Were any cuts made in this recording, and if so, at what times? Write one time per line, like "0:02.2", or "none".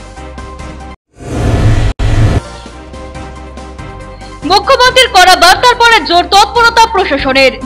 0:00.9

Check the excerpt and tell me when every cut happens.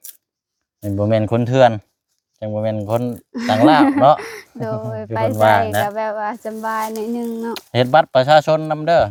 none

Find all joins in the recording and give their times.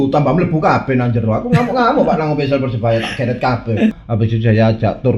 0:04.0

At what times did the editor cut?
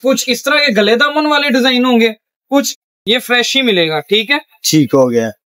0:02.7

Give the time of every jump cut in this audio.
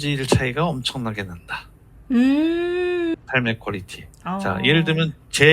0:03.1

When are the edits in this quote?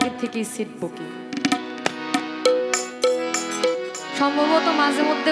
0:04.0

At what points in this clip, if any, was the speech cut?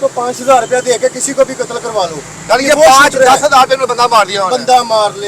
none

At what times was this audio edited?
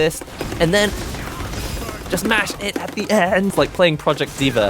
0:03.5

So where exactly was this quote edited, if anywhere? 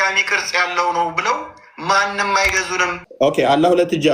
0:03.0

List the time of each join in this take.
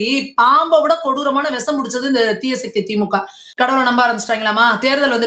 0:03.4

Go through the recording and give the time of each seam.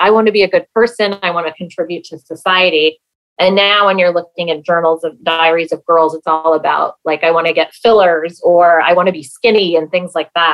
none

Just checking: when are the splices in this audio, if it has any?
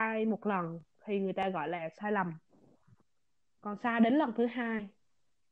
none

